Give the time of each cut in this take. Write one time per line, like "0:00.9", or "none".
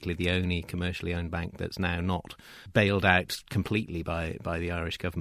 none